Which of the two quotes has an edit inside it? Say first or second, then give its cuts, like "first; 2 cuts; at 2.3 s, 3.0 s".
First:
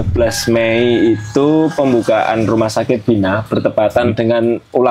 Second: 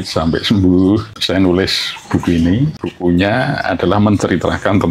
second; 2 cuts; at 1.2 s, 2.8 s